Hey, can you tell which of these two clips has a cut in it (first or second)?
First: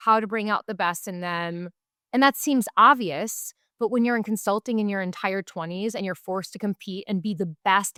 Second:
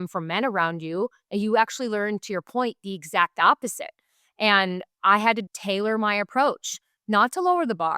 second